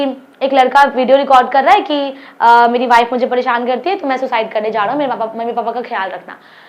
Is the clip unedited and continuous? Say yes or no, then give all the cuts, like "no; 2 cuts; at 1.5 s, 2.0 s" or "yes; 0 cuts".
yes; 0 cuts